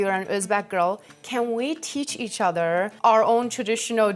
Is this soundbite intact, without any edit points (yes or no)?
yes